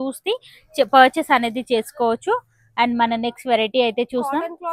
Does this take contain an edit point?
no; 0 cuts

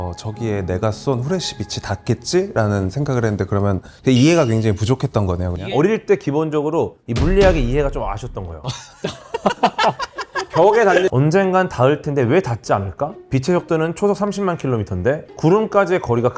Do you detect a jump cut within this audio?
yes; 3 cuts; at 3.9 s, 5.5 s, 11.1 s

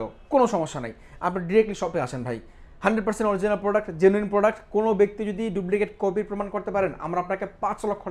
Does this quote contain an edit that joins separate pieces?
no; 0 cuts

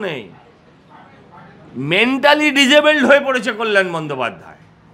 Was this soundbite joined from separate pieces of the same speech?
no; 0 cuts

